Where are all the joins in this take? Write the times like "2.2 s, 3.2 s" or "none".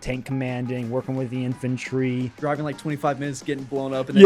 2.3 s